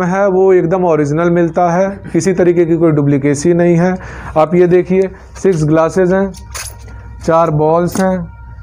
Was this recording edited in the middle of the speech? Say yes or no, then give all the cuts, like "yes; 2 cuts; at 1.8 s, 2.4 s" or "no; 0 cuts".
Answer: no; 0 cuts